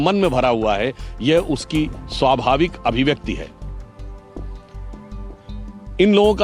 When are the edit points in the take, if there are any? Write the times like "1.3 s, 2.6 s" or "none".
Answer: none